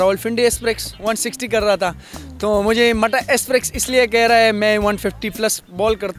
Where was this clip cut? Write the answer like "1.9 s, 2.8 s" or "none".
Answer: none